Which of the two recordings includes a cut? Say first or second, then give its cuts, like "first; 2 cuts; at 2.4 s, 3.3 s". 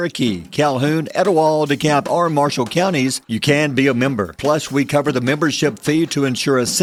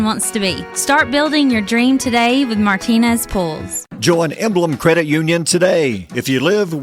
second; 1 cut; at 4.0 s